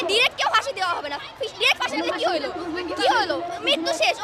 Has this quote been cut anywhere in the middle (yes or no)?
no